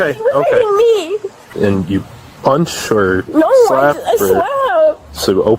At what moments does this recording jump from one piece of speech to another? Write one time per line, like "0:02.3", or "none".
0:01.4